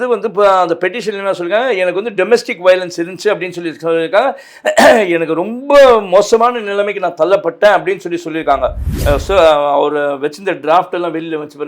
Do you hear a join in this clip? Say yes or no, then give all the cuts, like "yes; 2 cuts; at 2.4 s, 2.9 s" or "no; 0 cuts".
yes; 1 cut; at 8.9 s